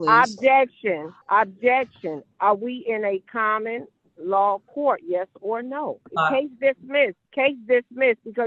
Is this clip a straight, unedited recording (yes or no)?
no